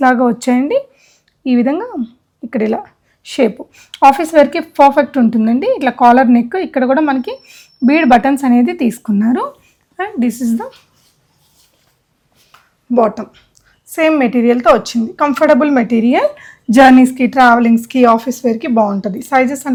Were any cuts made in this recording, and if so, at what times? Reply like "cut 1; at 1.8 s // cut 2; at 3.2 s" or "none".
none

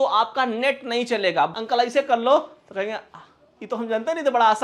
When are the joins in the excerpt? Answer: cut 1; at 1.5 s

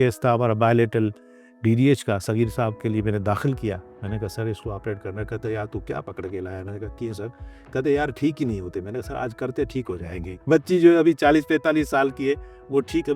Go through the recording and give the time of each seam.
cut 1; at 10.4 s

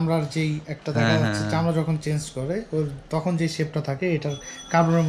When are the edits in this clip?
none

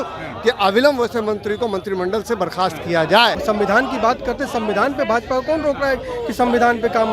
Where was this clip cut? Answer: cut 1; at 3.4 s

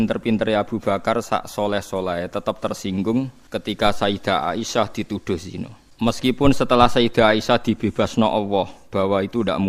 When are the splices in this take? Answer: cut 1; at 3.4 s // cut 2; at 5.8 s

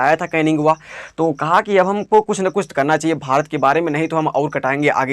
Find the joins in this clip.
none

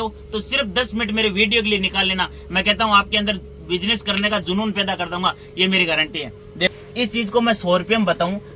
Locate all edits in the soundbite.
cut 1; at 6.7 s

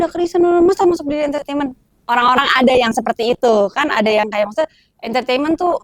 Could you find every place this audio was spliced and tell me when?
none

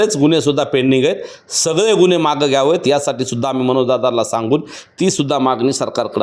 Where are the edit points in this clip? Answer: none

